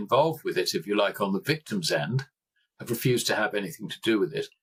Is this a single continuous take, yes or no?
yes